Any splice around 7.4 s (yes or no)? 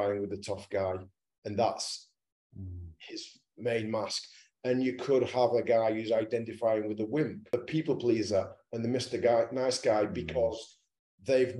yes